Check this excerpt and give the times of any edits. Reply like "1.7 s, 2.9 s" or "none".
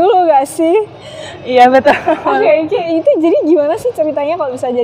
none